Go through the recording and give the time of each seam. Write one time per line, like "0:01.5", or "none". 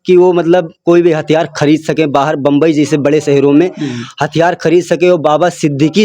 none